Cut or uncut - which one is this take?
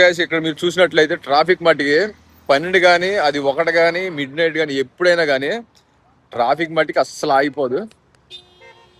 uncut